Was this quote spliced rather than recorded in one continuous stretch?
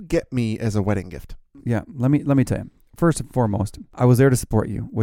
yes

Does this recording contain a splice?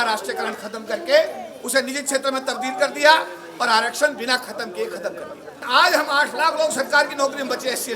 yes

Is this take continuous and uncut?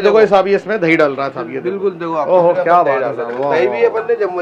yes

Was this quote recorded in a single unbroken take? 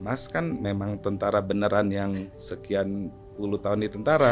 yes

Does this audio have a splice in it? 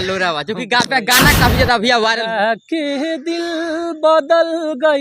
yes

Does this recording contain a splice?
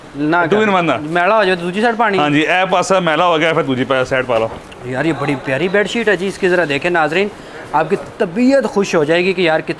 yes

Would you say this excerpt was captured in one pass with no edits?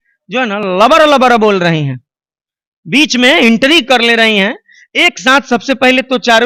yes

